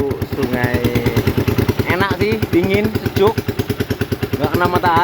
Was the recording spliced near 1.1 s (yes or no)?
yes